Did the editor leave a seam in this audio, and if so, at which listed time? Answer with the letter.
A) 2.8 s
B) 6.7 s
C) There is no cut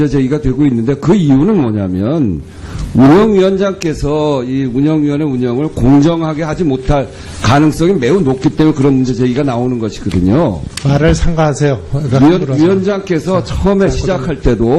C